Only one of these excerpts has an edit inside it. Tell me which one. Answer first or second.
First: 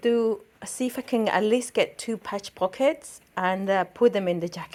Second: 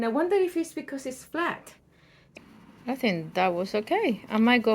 second